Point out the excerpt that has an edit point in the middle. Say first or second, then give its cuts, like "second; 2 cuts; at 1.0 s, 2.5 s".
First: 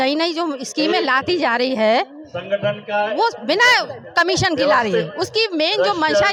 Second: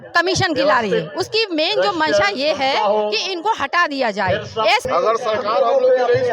second; 1 cut; at 4.8 s